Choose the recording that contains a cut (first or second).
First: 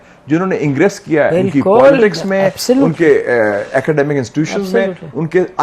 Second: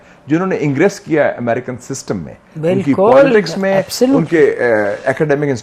first